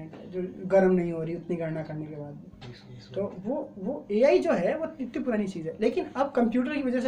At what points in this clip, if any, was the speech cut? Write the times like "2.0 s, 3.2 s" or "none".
none

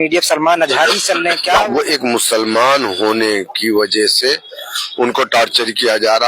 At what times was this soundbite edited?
1.6 s

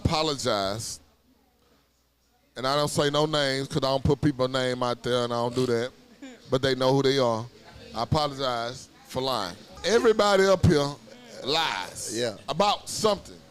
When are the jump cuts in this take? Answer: 9.7 s

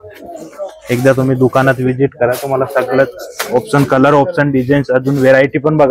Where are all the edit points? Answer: none

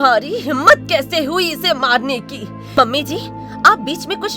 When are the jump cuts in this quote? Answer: 2.6 s

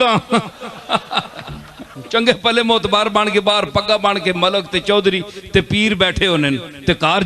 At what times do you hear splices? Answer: 2.0 s

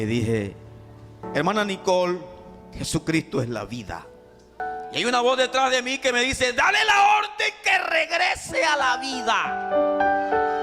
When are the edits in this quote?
1.2 s, 4.6 s

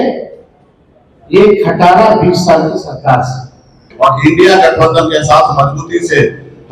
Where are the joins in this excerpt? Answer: 3.8 s

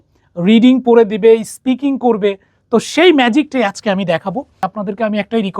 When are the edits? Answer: 4.6 s

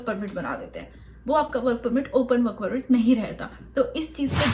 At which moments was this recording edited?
none

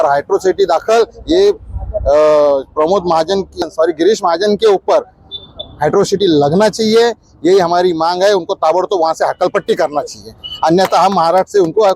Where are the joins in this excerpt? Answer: 3.6 s

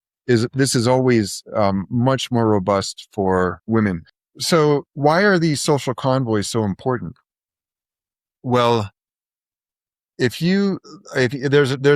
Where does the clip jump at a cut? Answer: none

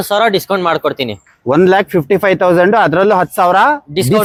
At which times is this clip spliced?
none

